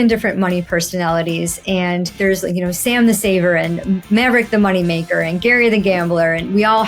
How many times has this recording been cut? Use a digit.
1